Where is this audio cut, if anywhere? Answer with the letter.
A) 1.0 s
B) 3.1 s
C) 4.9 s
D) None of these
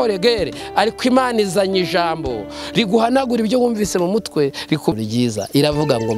C